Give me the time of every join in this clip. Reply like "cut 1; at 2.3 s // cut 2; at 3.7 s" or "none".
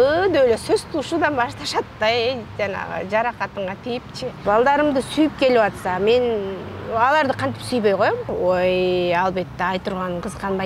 cut 1; at 4.4 s // cut 2; at 8.3 s